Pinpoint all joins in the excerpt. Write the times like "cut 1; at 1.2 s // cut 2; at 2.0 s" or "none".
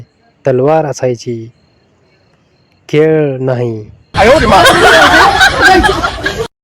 cut 1; at 3.8 s